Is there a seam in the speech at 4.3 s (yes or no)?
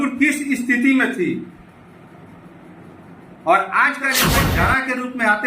yes